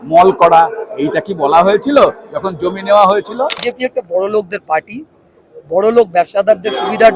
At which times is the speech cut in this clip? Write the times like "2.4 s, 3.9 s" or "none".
3.6 s